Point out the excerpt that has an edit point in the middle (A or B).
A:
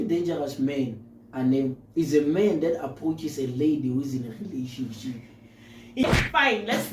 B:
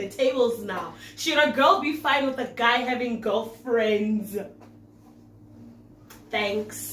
A